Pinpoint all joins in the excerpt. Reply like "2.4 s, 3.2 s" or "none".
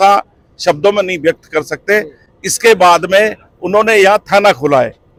none